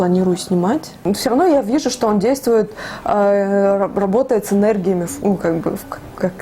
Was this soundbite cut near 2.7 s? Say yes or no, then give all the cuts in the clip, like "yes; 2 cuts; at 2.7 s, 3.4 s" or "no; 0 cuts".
no; 1 cut; at 0.9 s